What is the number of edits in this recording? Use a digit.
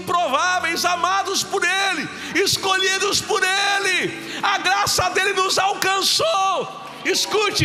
0